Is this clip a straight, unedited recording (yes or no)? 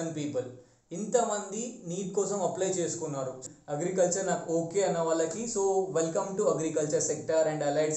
no